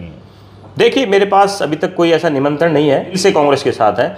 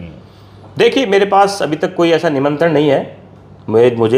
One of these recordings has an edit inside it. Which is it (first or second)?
first